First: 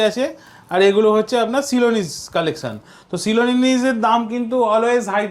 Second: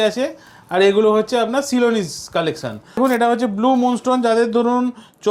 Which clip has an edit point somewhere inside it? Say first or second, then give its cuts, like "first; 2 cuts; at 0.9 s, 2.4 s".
second; 1 cut; at 3.0 s